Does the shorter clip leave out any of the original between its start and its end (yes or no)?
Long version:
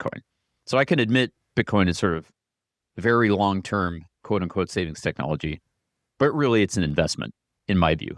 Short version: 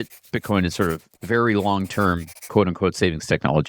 yes